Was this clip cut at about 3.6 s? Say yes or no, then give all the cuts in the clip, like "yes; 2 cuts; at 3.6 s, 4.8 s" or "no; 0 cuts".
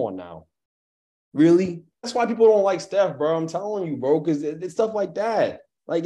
no; 1 cut; at 2.0 s